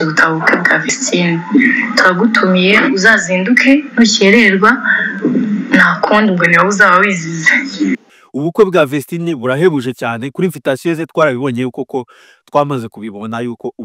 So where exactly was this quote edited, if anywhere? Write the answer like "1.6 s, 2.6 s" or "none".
8.2 s